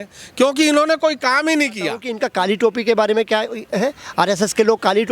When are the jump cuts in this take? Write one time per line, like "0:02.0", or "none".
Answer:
0:02.1